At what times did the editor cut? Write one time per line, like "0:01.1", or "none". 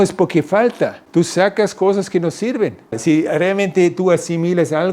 0:01.0
0:03.0